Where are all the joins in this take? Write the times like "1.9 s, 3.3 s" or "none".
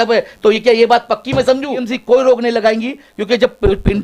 1.9 s